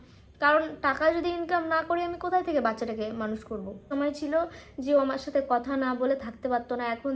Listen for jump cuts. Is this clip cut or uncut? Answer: cut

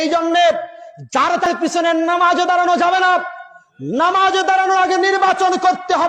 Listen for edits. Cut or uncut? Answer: cut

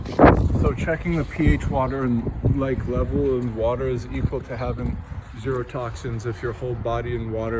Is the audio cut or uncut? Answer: uncut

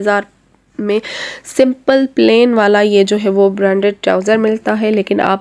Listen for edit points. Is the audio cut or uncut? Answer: uncut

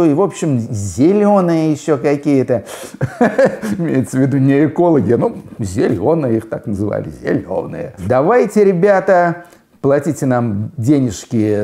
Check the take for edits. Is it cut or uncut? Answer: cut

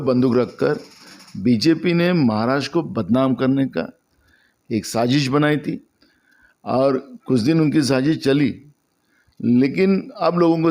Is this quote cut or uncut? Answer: uncut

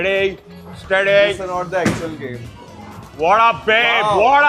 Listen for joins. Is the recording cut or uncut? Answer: uncut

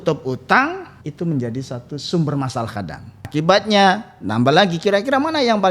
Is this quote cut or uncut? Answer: cut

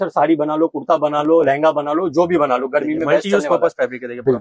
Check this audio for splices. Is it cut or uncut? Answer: uncut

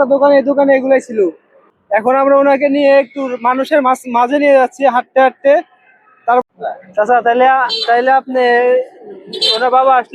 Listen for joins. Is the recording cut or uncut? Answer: cut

